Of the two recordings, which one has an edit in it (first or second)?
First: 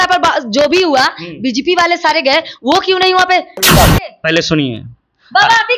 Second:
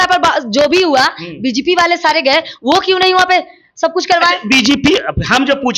first